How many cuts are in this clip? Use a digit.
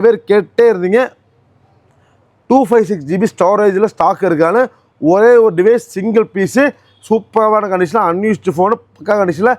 0